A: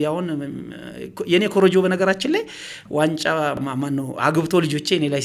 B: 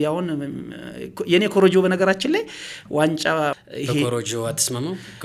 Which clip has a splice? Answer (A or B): B